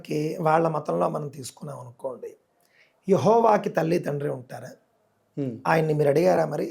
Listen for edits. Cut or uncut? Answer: uncut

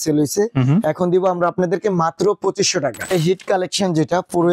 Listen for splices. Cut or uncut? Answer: cut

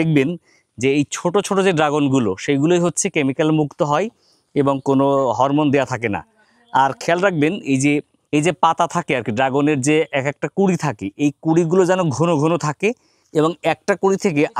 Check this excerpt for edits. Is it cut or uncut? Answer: uncut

